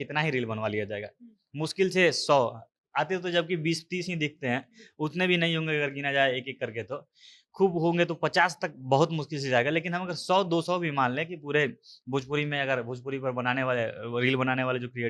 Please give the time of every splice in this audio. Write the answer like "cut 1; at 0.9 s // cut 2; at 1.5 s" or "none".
none